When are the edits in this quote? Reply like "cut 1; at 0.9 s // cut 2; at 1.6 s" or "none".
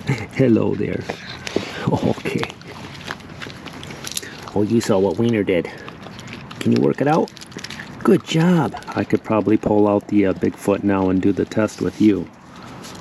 cut 1; at 8.9 s